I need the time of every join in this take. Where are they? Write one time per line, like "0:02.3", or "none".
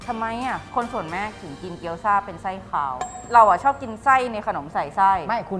0:03.2